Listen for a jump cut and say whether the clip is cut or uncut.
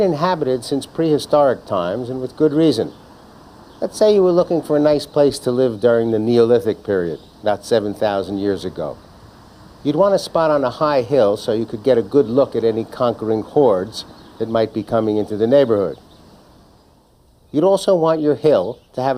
cut